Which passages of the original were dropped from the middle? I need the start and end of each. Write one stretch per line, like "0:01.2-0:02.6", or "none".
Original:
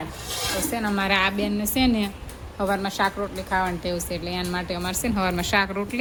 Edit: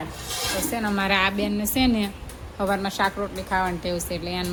none